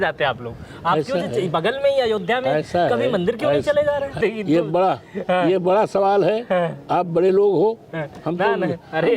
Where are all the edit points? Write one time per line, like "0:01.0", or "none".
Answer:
0:04.2